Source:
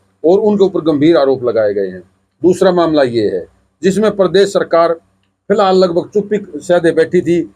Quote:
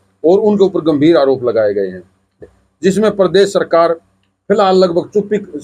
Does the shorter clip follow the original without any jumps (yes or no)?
no